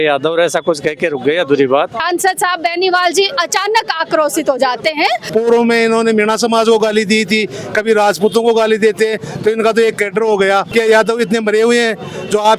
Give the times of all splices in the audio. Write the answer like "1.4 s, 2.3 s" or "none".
2.0 s, 5.2 s, 10.7 s